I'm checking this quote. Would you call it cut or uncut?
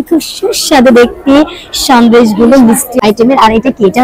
cut